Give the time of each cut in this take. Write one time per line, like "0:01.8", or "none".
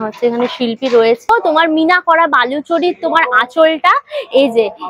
0:01.3